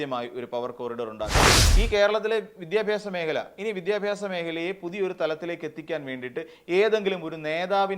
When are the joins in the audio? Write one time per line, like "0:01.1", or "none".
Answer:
0:01.5